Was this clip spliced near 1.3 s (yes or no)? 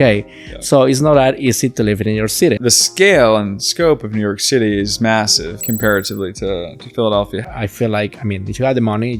no